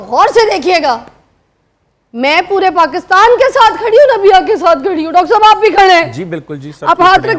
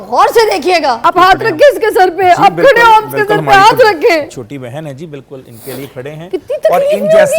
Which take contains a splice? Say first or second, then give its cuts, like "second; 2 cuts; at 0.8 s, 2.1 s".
second; 1 cut; at 1.0 s